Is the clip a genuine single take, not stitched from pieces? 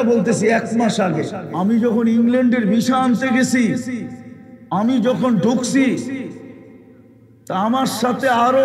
no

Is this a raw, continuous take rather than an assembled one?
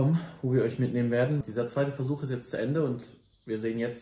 no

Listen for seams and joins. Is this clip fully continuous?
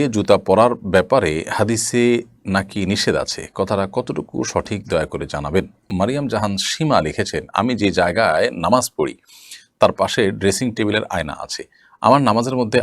no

